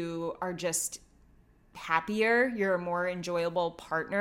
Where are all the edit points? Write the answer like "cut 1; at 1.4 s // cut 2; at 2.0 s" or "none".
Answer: none